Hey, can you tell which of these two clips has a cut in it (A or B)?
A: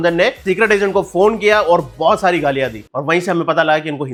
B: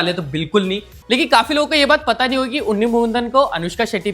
B